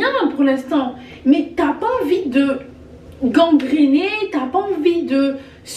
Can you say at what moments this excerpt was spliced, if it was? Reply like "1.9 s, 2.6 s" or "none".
none